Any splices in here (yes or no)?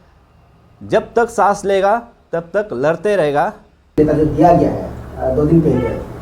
yes